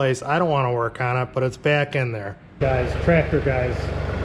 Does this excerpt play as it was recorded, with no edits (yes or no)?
no